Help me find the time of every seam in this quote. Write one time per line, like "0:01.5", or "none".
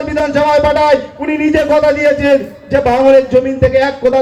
none